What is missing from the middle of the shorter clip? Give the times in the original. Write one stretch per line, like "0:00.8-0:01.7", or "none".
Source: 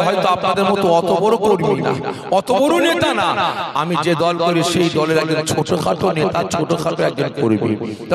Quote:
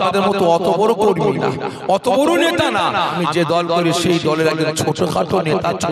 0:03.6-0:03.8